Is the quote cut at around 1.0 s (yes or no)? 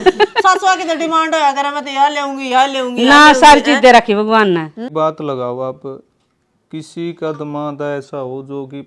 no